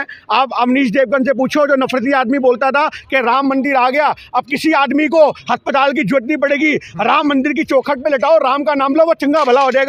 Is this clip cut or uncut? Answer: uncut